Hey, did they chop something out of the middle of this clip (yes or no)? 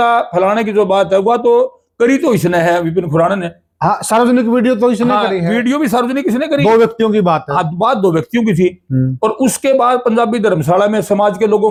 no